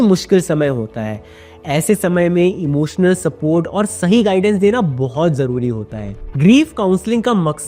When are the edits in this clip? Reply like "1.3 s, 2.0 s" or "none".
none